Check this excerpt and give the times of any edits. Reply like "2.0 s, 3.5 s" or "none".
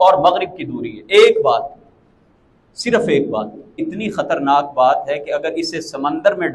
3.8 s

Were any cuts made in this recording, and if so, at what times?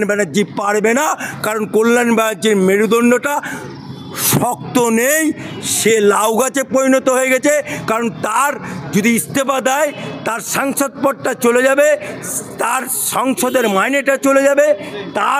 none

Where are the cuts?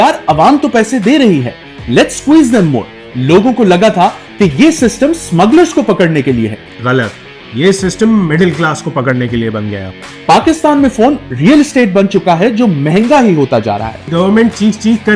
9.8 s, 14.1 s

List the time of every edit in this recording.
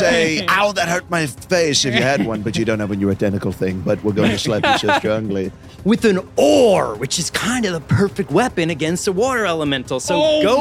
5.7 s

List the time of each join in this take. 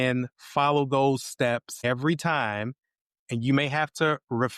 1.7 s

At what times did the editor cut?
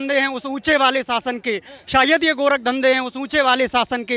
none

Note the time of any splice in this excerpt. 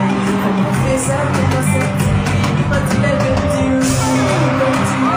none

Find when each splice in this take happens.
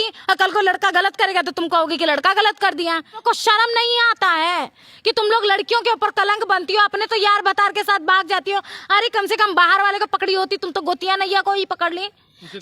3.2 s

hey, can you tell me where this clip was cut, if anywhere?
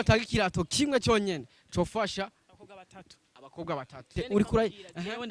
4.1 s

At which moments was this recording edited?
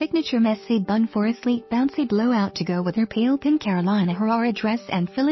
none

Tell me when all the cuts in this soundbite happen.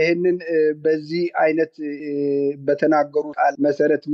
none

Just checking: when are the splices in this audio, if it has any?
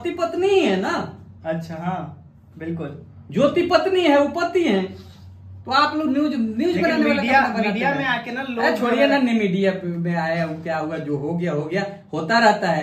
none

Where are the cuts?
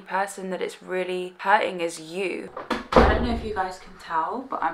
1.3 s, 2.5 s

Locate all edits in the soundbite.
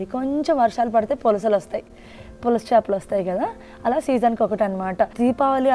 none

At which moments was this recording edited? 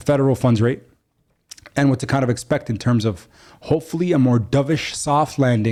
none

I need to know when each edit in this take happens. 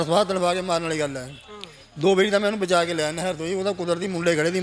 none

